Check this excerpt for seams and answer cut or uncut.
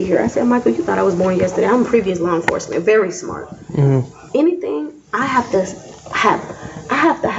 uncut